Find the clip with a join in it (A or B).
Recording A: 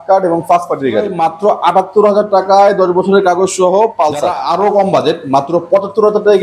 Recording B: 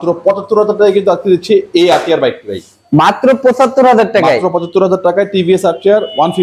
A